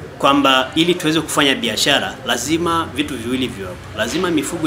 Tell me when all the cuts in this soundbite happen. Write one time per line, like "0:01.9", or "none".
none